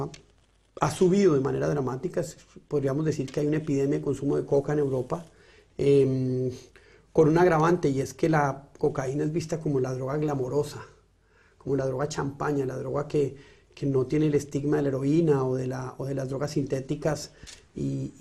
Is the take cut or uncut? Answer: uncut